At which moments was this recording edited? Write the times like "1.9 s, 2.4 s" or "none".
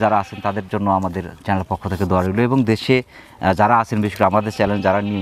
none